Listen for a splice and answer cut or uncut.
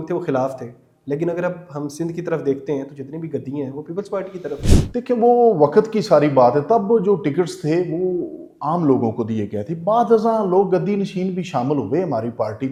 uncut